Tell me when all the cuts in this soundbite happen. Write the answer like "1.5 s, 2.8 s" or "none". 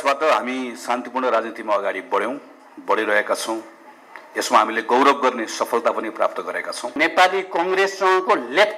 7.0 s

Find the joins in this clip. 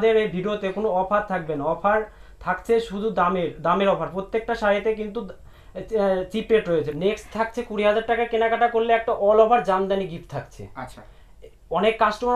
6.9 s

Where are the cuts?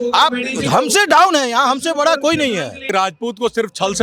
2.9 s

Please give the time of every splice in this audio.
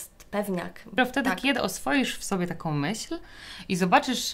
1.0 s

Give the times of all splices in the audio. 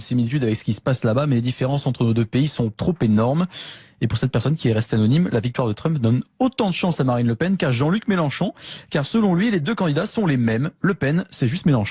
5.7 s

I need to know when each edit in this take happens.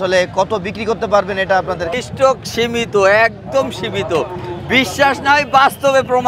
2.0 s

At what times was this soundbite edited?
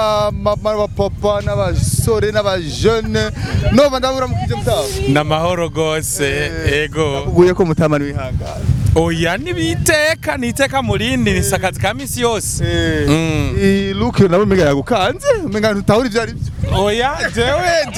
none

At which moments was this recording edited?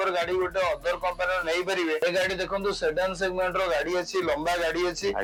none

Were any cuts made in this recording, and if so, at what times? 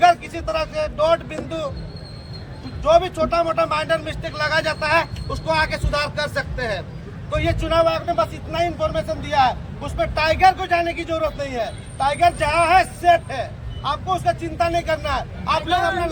none

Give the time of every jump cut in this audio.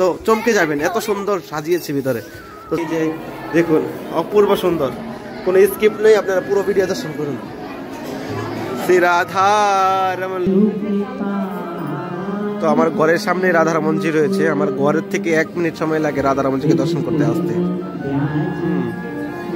2.8 s, 10.5 s

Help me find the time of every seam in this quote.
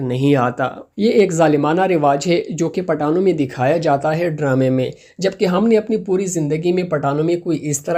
none

